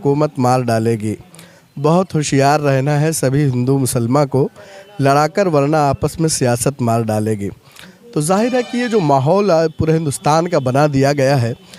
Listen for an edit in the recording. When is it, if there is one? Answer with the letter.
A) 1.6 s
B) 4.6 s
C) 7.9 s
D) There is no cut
D